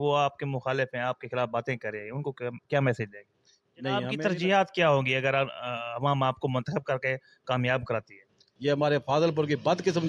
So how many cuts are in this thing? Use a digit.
2